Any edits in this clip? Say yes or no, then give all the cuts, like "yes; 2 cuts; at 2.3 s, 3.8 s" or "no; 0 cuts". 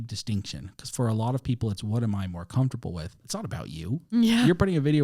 yes; 1 cut; at 3.2 s